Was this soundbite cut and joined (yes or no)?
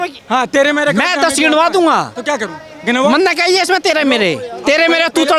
no